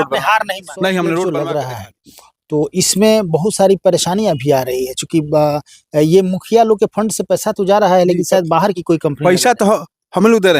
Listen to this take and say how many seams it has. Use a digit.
1